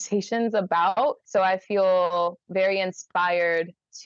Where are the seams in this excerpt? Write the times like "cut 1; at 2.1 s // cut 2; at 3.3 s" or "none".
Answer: cut 1; at 1.2 s